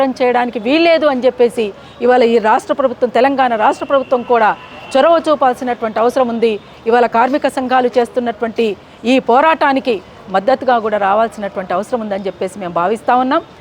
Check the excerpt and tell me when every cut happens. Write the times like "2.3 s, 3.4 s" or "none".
none